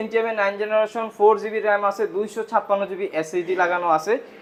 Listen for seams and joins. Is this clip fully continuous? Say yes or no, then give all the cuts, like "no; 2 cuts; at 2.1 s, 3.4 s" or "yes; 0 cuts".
yes; 0 cuts